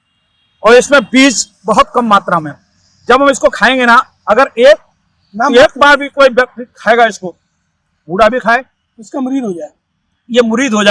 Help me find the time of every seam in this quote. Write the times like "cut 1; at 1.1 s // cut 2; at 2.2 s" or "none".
none